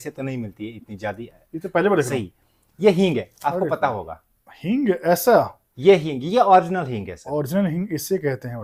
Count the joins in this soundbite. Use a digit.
0